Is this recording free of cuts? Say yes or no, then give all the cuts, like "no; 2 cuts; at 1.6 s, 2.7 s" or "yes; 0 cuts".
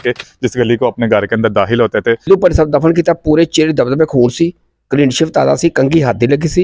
no; 1 cut; at 2.3 s